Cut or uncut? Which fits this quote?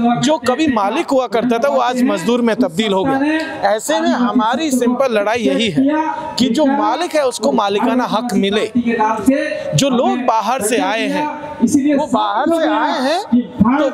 uncut